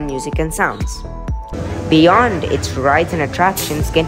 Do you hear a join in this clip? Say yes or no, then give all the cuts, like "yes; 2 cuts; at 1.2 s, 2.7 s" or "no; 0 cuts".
yes; 1 cut; at 1.7 s